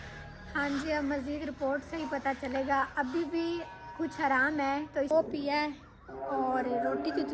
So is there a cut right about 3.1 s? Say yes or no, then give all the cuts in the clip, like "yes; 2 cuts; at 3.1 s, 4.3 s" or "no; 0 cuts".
no; 1 cut; at 5.1 s